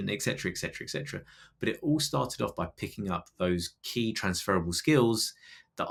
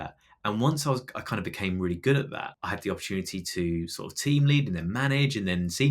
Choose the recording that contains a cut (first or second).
second